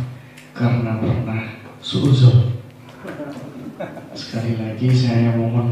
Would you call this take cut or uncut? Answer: uncut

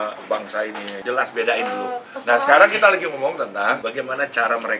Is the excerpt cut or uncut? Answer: cut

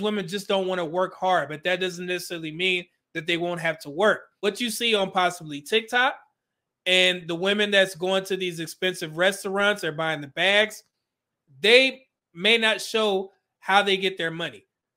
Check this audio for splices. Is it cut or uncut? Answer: cut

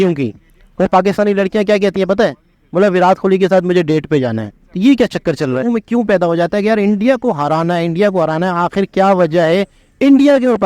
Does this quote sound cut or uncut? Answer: cut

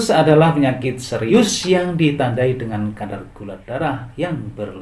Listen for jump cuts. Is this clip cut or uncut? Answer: cut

